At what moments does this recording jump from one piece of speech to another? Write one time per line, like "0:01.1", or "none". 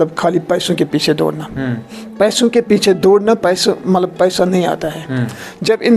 none